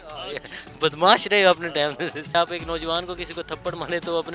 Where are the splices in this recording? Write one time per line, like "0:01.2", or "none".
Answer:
0:02.3